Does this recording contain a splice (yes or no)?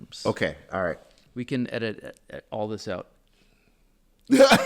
yes